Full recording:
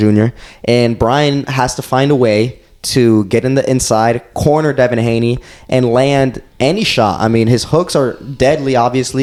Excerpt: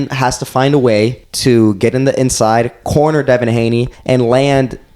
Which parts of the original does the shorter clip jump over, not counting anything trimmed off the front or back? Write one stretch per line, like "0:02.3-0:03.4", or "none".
0:02.6-0:02.8
0:05.4-0:05.6